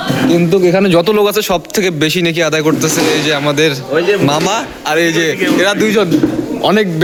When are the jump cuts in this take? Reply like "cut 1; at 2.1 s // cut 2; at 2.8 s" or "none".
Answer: none